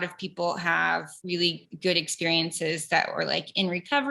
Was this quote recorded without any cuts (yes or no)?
no